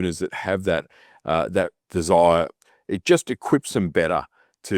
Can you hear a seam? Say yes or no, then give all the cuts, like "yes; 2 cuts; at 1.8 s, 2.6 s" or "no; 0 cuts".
no; 0 cuts